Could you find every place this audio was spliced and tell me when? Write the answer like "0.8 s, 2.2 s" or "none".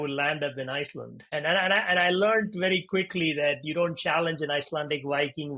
1.2 s